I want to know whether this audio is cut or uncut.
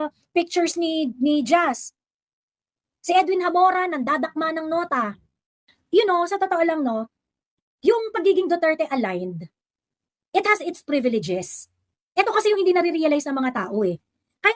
cut